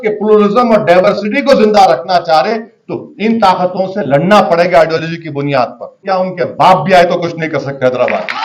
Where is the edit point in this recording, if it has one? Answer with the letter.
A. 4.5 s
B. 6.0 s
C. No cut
B